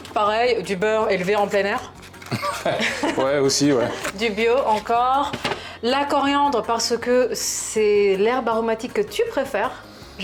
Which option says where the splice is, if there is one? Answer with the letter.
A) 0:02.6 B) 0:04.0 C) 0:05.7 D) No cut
D